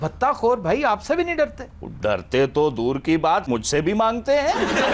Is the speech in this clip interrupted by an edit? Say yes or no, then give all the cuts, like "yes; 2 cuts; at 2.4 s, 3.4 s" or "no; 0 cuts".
no; 0 cuts